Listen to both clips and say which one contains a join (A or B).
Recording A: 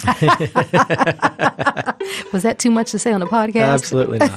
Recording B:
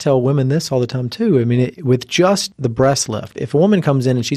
B